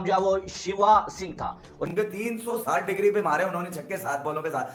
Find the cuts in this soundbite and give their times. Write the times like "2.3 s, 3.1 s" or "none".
1.9 s